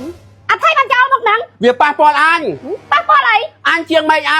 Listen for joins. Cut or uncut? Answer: uncut